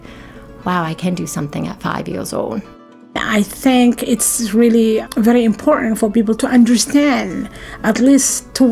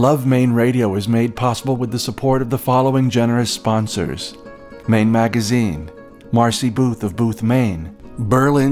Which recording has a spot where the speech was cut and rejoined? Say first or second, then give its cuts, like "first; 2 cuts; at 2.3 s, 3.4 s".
first; 2 cuts; at 3.2 s, 5.0 s